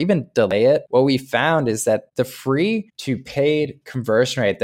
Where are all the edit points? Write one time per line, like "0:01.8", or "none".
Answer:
0:00.8
0:02.1
0:02.9

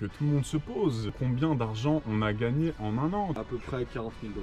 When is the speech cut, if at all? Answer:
0:01.2
0:03.4

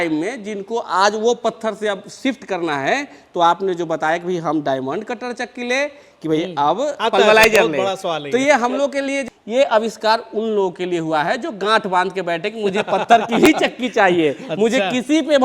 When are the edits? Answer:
0:09.2

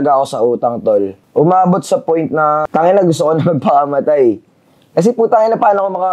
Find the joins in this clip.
0:01.2
0:02.7

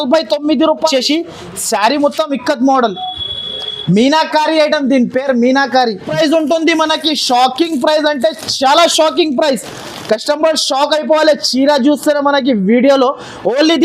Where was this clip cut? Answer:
0:00.9
0:06.1

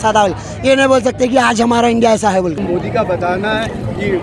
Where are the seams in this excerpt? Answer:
0:02.6

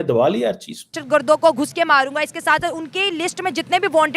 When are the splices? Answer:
0:01.0

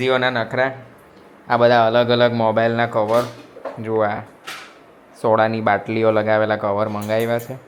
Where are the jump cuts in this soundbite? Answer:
none

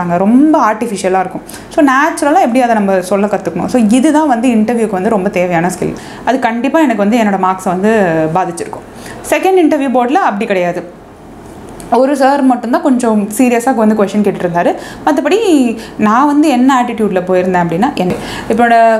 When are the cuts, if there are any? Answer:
0:06.1
0:18.1

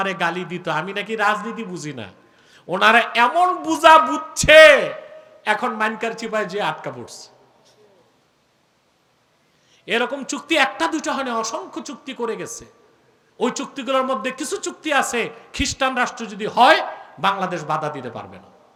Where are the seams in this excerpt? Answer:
none

